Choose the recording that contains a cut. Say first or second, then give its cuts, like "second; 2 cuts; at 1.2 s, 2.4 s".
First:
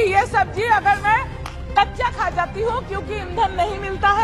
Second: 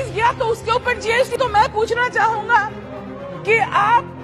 second; 1 cut; at 1.4 s